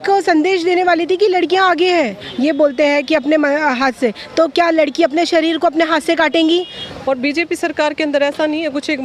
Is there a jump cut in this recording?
yes; 2 cuts; at 2.2 s, 6.8 s

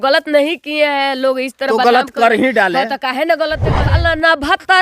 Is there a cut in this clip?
yes; 1 cut; at 3.7 s

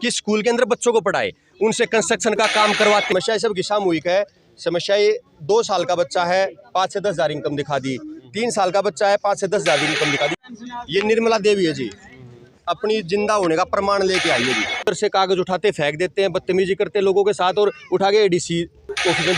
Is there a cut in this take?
yes; 3 cuts; at 3.1 s, 10.4 s, 14.8 s

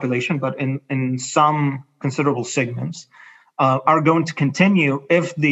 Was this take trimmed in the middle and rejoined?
no; 0 cuts

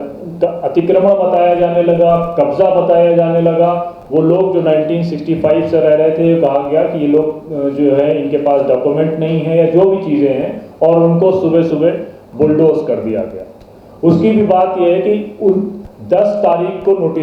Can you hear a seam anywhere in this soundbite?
no; 0 cuts

